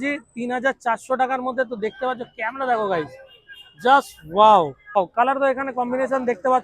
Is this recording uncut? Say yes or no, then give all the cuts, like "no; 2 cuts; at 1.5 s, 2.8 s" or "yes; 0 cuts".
no; 1 cut; at 5.0 s